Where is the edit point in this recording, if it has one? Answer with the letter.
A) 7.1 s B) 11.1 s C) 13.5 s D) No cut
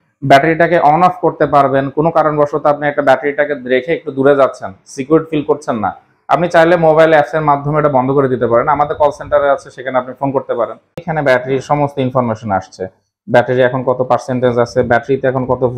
B